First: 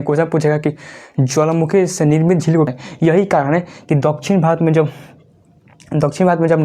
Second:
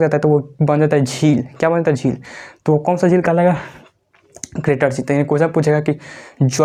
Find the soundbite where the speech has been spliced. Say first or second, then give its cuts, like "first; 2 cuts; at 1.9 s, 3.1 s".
first; 1 cut; at 2.7 s